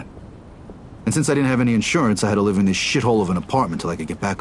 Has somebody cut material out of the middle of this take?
no; 0 cuts

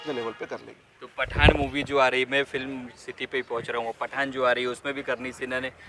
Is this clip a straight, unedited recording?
yes; 0 cuts

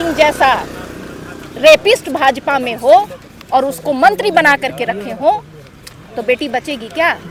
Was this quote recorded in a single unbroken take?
yes; 0 cuts

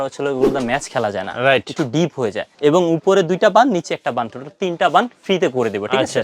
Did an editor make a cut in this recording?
yes; 1 cut; at 2.5 s

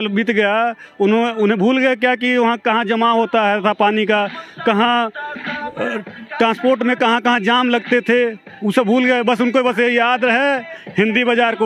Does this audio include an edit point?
no; 0 cuts

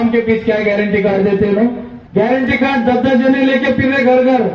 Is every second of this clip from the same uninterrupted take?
no; 1 cut; at 1.9 s

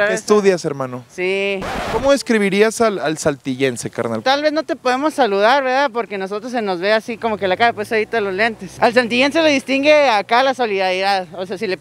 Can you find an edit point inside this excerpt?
no; 0 cuts

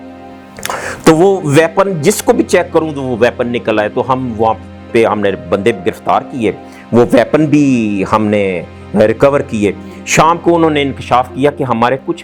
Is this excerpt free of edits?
yes; 0 cuts

